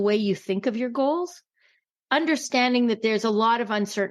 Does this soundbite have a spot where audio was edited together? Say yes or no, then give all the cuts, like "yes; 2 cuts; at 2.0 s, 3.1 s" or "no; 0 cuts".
yes; 1 cut; at 1.6 s